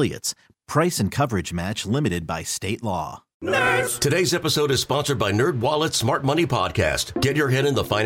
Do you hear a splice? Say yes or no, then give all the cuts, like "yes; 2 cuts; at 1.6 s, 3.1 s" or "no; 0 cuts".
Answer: yes; 1 cut; at 3.2 s